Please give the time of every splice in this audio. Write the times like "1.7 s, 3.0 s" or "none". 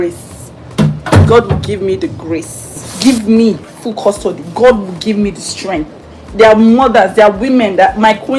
2.9 s